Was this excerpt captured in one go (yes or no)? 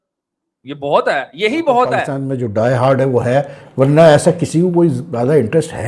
no